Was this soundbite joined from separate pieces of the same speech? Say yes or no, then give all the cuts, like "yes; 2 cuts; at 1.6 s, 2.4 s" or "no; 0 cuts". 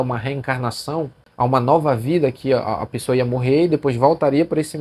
yes; 1 cut; at 1.2 s